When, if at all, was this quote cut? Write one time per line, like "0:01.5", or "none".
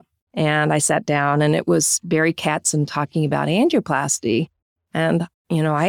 none

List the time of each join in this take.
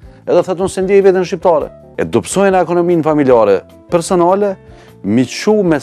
0:01.8

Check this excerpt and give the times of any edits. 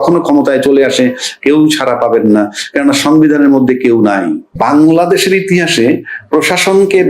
0:04.6

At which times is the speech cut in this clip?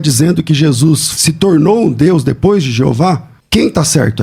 0:01.1
0:03.3

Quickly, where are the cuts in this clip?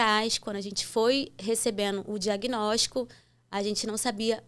none

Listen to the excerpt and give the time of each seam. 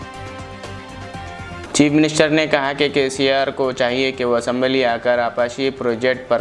0:01.6

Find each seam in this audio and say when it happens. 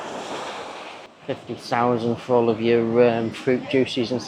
0:01.0

